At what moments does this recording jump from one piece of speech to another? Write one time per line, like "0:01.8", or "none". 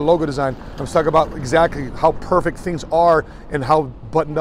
none